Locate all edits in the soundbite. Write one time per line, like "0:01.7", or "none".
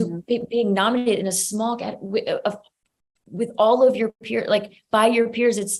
none

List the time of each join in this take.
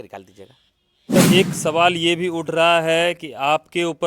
0:01.2

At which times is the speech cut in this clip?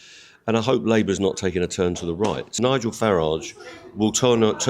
0:02.5

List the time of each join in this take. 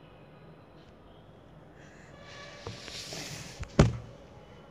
none

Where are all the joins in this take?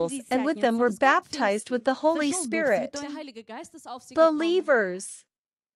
0:04.5

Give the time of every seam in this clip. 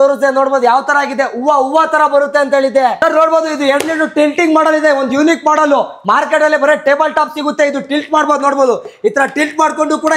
0:03.0

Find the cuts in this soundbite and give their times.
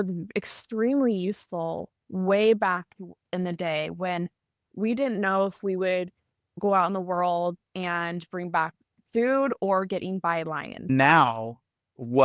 0:06.6
0:10.9

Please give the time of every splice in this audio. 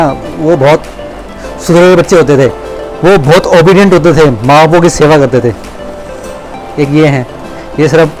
none

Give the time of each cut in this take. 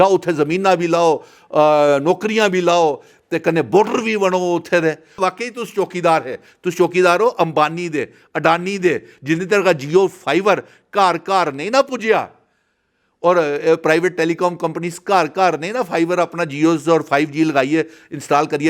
0:05.2

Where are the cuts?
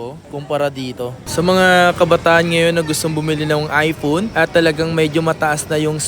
0:01.2

